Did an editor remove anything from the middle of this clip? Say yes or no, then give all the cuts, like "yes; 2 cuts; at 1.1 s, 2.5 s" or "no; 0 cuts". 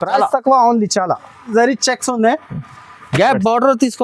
yes; 1 cut; at 1.4 s